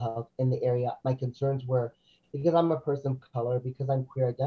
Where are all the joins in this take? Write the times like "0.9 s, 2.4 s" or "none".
none